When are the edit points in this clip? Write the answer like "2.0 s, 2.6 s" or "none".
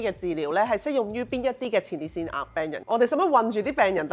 2.8 s